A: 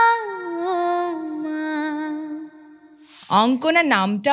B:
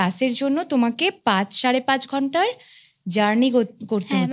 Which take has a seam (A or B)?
A